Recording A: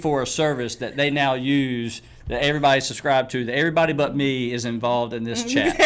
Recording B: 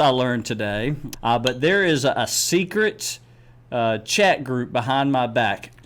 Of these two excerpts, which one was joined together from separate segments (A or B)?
B